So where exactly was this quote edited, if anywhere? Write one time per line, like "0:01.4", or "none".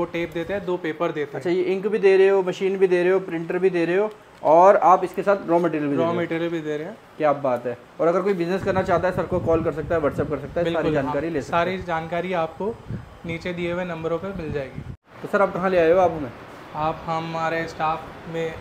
none